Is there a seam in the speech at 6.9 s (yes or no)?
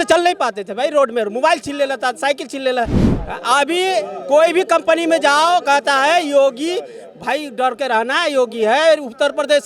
no